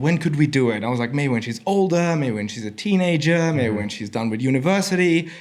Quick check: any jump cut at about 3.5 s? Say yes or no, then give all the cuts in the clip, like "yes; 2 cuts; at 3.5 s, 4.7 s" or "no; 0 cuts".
no; 0 cuts